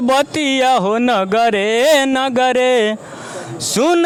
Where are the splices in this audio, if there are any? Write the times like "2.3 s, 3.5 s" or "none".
none